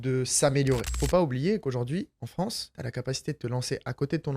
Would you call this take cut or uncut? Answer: cut